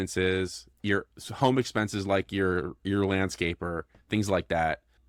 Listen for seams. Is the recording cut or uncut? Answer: uncut